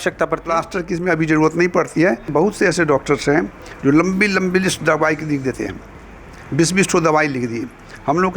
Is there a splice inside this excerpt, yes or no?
yes